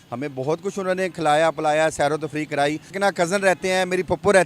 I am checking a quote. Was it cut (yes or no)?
yes